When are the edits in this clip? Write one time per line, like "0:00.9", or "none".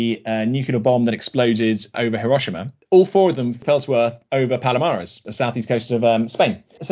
0:02.7